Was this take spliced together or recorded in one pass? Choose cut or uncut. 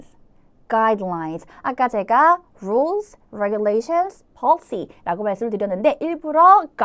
uncut